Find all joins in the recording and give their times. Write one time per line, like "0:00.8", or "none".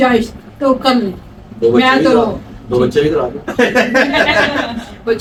none